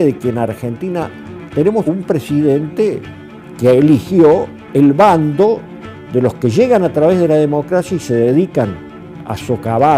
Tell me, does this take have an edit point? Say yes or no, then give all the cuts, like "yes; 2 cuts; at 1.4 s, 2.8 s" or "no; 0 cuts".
yes; 1 cut; at 1.4 s